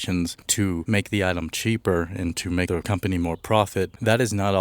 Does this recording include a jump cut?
yes; 2 cuts; at 0.8 s, 2.7 s

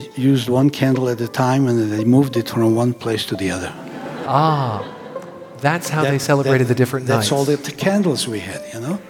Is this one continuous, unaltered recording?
yes; 0 cuts

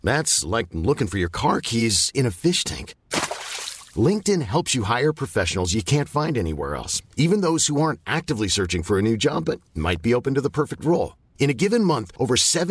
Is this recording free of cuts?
yes; 0 cuts

